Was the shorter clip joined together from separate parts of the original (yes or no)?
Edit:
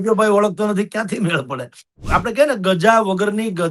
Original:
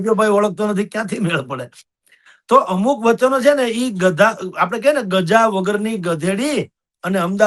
yes